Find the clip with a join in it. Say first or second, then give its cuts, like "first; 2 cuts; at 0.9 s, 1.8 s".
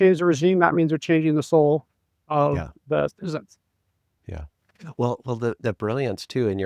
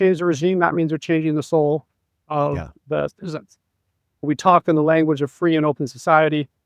second; 1 cut; at 4.2 s